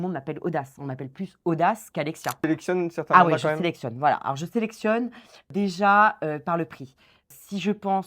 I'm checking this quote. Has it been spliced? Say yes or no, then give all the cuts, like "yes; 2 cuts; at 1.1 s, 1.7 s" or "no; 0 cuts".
yes; 3 cuts; at 2.5 s, 5.5 s, 7.3 s